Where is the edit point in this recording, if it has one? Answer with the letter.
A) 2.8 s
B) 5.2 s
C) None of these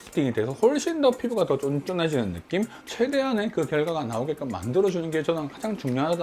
A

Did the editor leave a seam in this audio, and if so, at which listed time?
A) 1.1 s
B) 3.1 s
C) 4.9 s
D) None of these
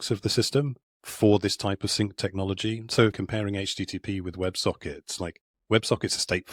B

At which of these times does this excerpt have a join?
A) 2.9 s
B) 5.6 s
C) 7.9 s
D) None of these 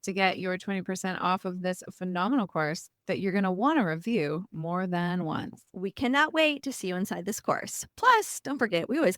B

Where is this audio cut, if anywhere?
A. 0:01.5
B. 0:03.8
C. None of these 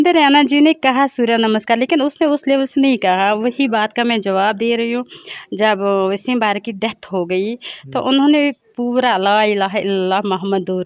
C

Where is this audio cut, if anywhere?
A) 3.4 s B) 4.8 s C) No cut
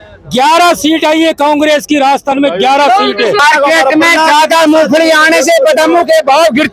A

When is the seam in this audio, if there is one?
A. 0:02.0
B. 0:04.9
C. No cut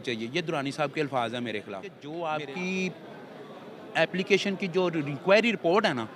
A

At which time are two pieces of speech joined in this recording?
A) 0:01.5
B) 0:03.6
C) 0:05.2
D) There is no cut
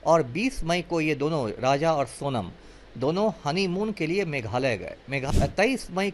C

